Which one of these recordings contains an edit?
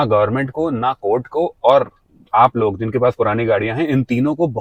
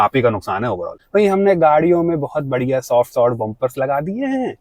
second; 1 cut; at 0.9 s

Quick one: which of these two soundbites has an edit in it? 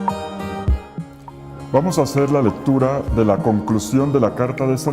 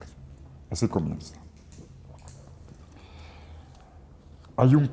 second; 1 cut; at 1.5 s

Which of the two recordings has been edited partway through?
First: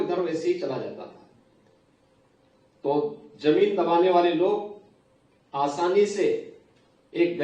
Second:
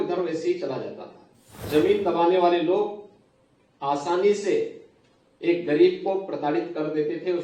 second; 1 cut; at 1.5 s

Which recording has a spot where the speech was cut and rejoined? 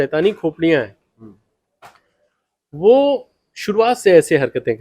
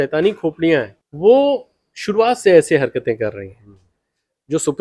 second; 1 cut; at 1.0 s

